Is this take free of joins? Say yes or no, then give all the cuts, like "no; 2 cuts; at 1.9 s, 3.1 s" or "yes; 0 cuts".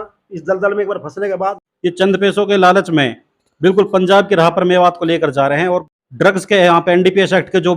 no; 2 cuts; at 1.5 s, 5.9 s